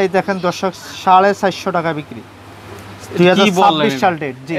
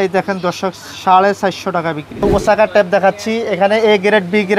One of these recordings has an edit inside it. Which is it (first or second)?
second